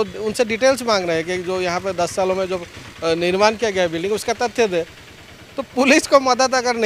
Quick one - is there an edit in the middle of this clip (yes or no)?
no